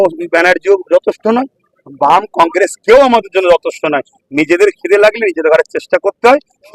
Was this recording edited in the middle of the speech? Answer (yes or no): no